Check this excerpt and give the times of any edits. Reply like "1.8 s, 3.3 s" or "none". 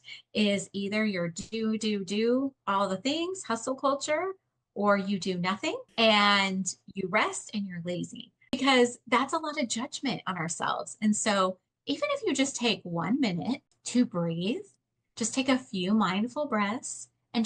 5.9 s, 8.5 s, 13.7 s